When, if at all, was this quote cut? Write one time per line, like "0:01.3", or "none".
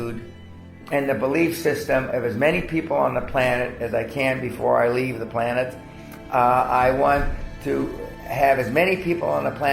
none